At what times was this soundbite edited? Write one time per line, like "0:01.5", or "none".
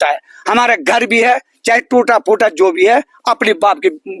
none